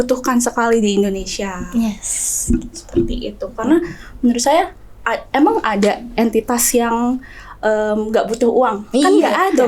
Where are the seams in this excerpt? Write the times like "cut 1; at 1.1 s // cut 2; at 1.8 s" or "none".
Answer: none